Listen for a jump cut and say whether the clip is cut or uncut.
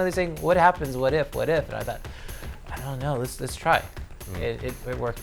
uncut